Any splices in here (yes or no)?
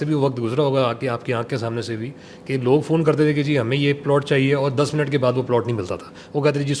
no